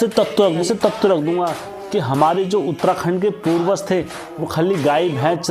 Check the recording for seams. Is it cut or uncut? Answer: uncut